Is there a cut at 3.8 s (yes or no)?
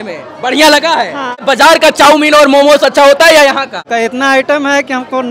yes